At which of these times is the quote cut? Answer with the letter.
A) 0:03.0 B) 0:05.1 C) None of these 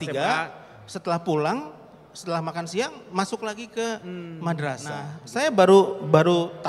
B